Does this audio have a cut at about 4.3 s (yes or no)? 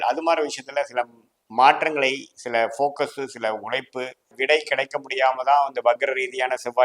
yes